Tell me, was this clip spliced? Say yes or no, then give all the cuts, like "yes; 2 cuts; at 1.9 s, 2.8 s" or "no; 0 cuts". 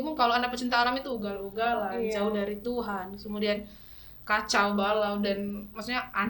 no; 0 cuts